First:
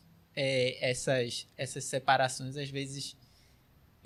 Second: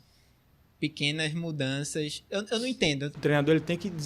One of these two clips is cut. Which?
second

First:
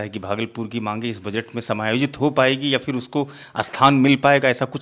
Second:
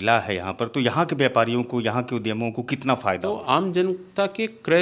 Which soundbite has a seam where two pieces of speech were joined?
second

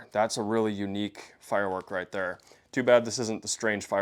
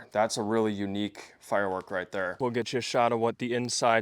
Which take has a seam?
second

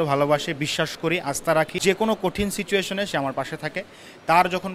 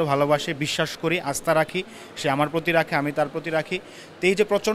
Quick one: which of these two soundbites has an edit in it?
first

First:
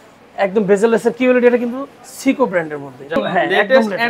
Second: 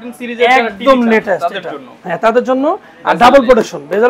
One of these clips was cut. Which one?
first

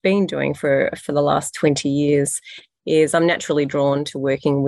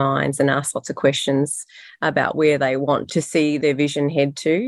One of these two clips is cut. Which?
second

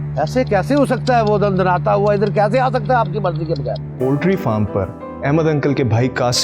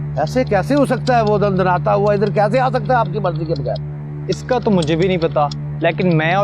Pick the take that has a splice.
first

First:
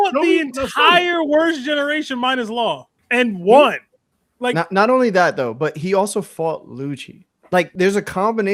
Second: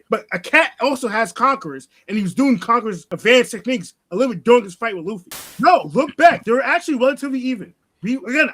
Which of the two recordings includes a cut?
second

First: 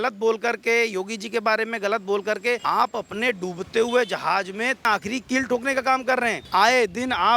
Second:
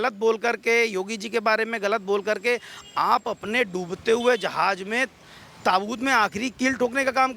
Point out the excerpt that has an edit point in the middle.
first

